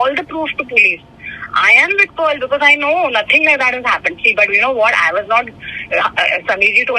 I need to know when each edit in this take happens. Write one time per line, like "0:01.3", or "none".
none